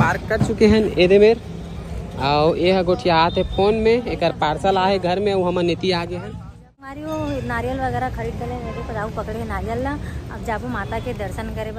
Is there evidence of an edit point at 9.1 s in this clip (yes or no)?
no